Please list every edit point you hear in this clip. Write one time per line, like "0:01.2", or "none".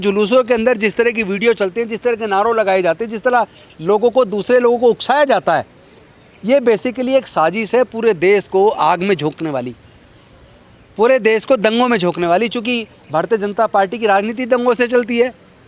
none